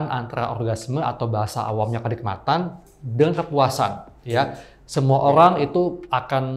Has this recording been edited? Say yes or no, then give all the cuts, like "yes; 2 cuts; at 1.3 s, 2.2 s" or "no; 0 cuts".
no; 0 cuts